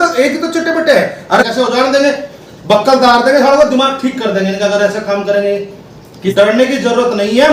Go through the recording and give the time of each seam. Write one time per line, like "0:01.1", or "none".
0:01.4
0:06.2